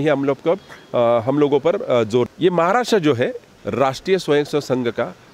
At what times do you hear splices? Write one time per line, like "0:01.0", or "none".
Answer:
0:02.3
0:03.5

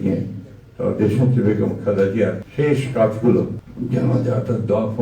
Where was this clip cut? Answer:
0:02.4
0:03.7

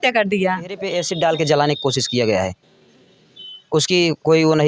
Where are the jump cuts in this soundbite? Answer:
0:01.0

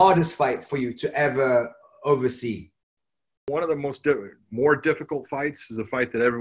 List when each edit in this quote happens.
0:03.5

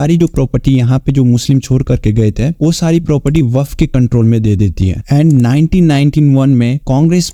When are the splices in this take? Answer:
none

